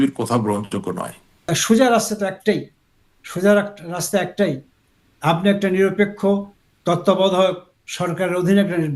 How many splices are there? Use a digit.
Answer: 1